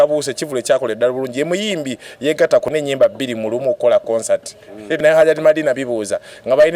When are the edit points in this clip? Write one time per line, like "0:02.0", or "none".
0:02.7
0:05.0